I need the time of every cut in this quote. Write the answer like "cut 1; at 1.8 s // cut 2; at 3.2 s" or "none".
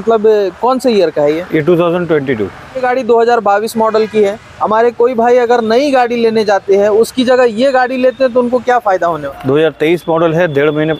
cut 1; at 2.8 s // cut 2; at 9.2 s